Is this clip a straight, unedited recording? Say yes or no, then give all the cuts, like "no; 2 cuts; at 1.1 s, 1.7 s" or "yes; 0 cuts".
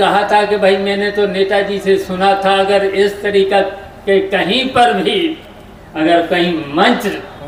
yes; 0 cuts